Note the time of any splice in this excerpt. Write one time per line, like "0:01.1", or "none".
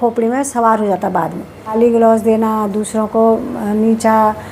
0:01.7